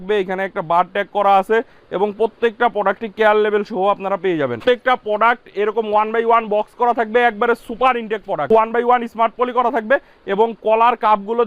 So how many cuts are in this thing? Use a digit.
2